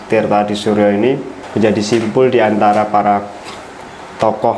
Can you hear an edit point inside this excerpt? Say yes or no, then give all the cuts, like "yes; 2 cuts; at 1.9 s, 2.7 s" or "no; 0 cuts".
yes; 1 cut; at 1.4 s